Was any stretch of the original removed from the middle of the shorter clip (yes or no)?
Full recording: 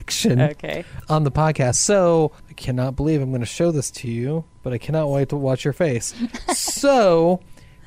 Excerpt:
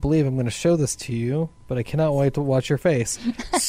no